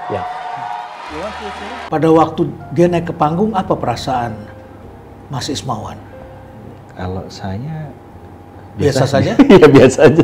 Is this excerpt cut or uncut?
cut